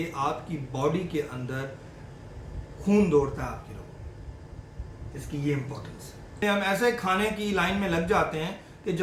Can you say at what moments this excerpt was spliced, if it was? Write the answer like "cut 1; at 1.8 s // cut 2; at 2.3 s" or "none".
cut 1; at 6.4 s